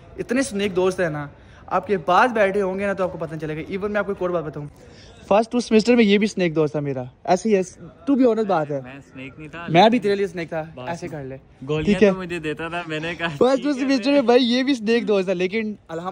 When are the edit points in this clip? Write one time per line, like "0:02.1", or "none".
none